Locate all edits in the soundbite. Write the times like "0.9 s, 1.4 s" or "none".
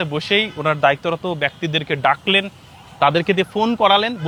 none